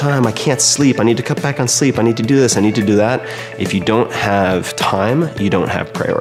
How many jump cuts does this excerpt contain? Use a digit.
0